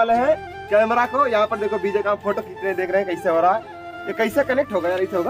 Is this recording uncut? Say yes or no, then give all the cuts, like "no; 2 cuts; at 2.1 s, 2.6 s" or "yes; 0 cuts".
yes; 0 cuts